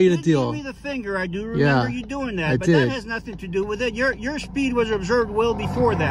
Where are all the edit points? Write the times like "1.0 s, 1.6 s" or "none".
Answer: none